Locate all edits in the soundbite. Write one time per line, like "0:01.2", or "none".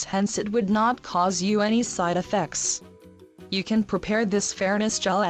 none